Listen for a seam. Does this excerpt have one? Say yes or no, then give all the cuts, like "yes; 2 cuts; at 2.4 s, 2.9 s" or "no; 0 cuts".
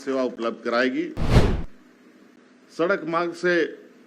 yes; 1 cut; at 1.4 s